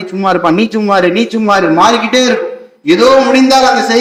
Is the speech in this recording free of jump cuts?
yes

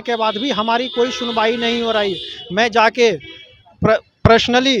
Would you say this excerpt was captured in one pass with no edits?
yes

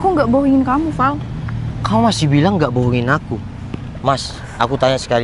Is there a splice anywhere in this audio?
no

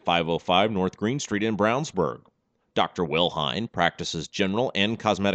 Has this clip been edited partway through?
no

